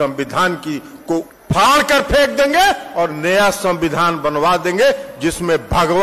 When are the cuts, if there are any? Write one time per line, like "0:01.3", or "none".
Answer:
0:01.4